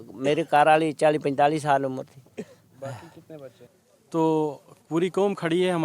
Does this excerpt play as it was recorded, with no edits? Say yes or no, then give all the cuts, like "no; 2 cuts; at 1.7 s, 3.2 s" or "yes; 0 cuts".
no; 1 cut; at 3.7 s